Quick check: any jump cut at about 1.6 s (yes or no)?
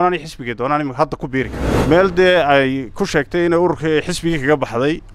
yes